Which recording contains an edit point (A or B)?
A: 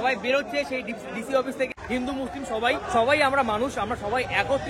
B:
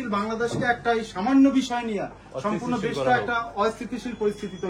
A